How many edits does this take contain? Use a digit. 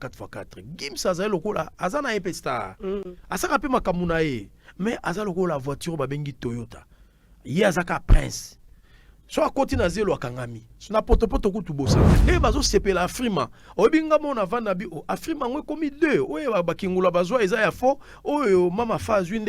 1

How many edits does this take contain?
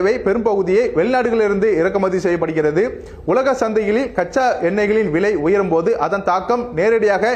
0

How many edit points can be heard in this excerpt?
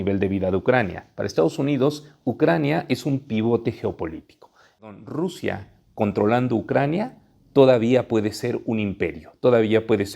1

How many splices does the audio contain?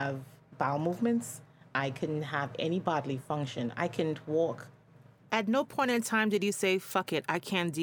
1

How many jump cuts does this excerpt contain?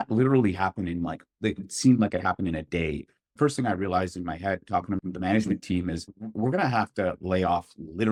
0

